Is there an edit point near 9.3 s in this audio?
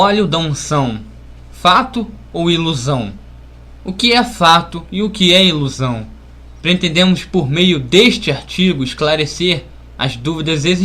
yes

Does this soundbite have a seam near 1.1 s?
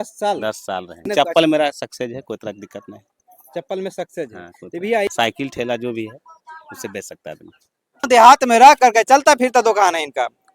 yes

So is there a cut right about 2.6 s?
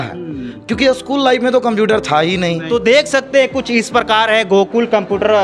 yes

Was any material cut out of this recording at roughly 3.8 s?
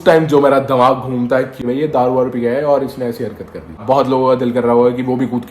yes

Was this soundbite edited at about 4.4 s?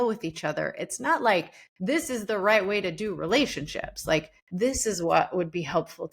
yes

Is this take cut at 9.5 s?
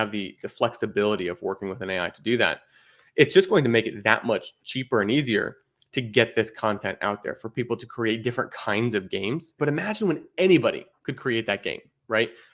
yes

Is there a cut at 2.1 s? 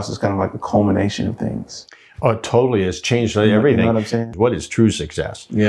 no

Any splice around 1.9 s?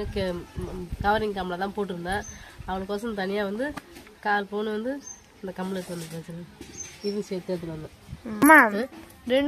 no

